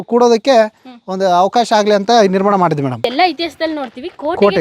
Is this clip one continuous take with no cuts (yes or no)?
no